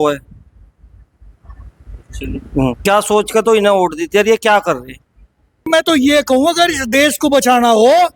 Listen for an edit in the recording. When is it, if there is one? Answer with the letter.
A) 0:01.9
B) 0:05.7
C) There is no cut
B